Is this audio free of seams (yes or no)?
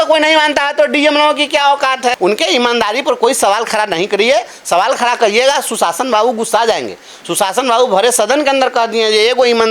no